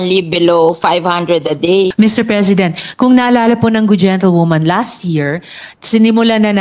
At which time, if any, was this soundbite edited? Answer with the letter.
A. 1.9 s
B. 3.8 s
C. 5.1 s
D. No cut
A